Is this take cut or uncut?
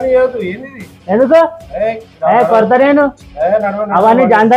uncut